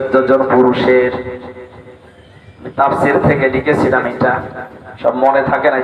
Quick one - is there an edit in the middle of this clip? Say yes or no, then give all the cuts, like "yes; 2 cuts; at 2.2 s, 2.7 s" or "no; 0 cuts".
no; 0 cuts